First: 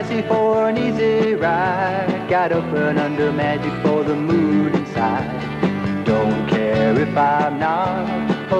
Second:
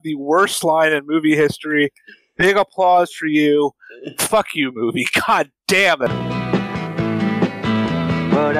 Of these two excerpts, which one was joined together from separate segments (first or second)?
second